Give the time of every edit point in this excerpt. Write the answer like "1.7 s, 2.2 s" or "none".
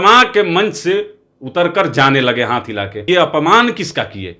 3.0 s